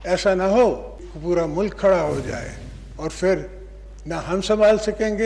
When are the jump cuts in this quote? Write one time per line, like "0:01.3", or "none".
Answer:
0:01.1

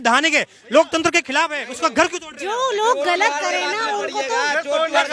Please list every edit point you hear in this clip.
none

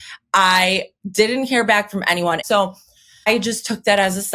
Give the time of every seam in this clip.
0:02.4

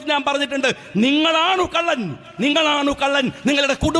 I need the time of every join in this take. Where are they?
none

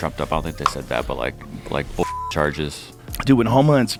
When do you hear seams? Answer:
none

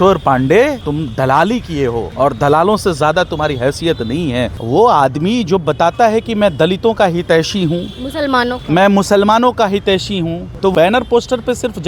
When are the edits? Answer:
0:00.8
0:02.1
0:04.6
0:10.7

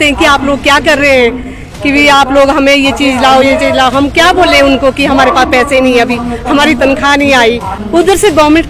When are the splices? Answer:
0:07.8

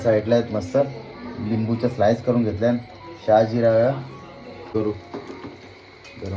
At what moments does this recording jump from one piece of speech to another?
0:04.7

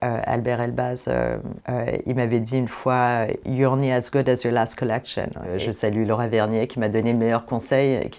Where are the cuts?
0:01.5
0:05.5

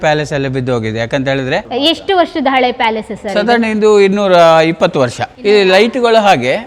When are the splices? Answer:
0:01.7
0:05.2

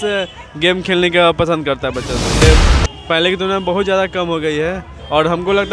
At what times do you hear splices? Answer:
0:02.4

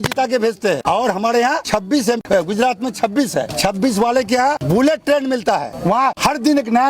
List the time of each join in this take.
0:00.8
0:02.1
0:03.5
0:04.6
0:06.1

